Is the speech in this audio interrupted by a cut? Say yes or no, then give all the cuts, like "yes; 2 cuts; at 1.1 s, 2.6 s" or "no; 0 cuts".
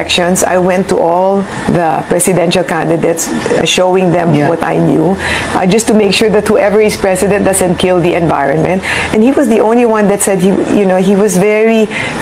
no; 0 cuts